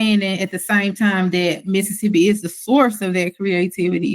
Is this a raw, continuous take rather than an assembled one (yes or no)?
yes